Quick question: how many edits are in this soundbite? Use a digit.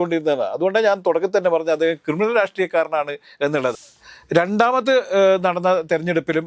1